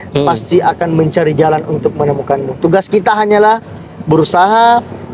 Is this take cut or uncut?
uncut